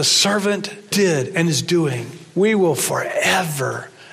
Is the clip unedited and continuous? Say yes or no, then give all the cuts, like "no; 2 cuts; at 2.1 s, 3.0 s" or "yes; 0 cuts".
no; 2 cuts; at 0.9 s, 2.2 s